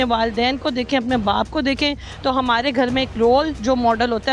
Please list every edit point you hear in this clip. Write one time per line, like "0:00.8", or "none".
none

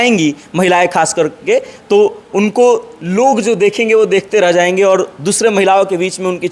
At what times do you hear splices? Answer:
none

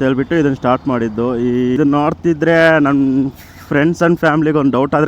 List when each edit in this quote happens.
0:01.8

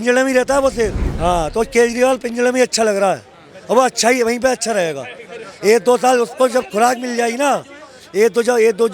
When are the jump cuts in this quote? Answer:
0:01.1

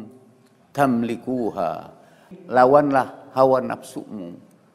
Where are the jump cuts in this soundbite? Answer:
0:02.2

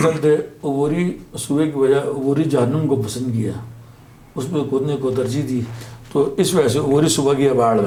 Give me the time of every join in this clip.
none

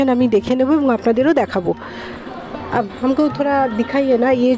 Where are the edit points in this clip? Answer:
none

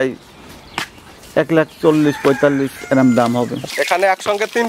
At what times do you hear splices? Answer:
0:03.6

